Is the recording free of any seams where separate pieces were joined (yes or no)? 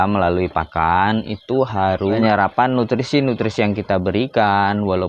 no